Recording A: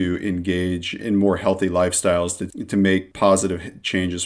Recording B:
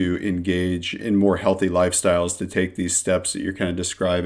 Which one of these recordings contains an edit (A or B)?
A